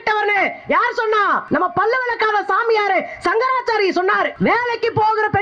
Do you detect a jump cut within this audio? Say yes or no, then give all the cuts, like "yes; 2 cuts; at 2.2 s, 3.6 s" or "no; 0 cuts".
yes; 2 cuts; at 1.4 s, 4.3 s